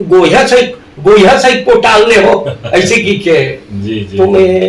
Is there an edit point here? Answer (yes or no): no